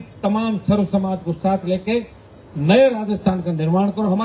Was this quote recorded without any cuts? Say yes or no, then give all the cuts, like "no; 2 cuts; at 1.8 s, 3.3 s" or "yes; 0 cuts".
yes; 0 cuts